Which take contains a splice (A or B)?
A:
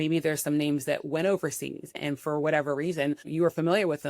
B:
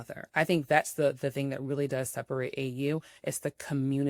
A